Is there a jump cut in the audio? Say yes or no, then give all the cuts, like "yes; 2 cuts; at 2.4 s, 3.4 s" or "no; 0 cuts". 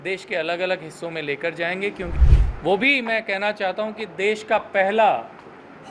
yes; 1 cut; at 2.1 s